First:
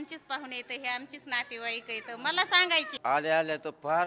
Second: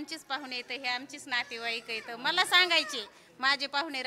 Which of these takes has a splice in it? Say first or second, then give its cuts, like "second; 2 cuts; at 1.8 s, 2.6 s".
first; 1 cut; at 3.0 s